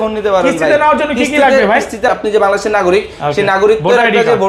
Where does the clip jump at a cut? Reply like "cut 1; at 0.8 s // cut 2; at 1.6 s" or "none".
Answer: cut 1; at 2.1 s